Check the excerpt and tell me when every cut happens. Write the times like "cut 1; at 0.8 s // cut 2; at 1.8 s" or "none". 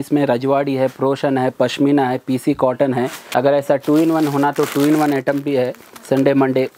cut 1; at 3.2 s